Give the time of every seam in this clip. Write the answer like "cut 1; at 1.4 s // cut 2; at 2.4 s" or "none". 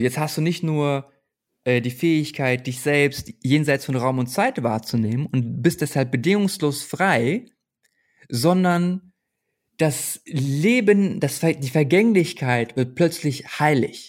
none